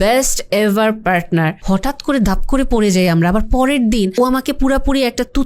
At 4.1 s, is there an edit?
yes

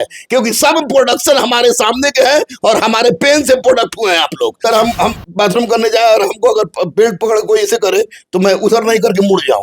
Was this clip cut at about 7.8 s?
no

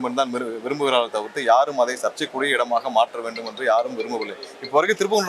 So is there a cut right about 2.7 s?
no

